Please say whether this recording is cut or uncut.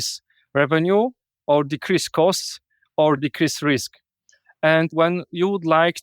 cut